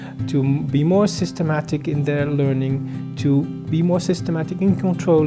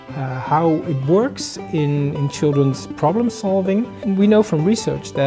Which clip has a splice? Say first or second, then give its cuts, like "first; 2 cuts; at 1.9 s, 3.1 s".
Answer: second; 1 cut; at 3.9 s